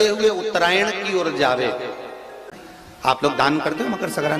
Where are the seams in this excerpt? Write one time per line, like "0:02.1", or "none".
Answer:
0:02.5